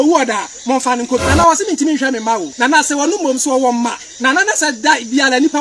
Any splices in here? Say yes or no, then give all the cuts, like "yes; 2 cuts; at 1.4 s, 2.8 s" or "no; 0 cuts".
yes; 2 cuts; at 1.3 s, 2.5 s